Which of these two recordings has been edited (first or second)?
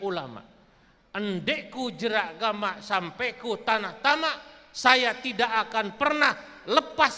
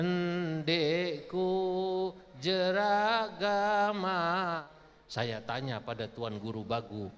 second